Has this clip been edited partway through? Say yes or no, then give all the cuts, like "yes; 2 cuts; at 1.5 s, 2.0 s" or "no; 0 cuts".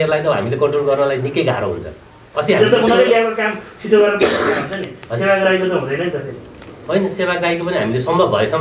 no; 0 cuts